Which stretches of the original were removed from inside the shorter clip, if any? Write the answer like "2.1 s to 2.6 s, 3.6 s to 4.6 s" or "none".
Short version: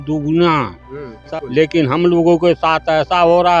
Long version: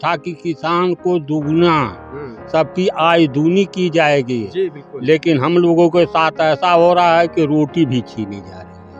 2.5 s to 4.8 s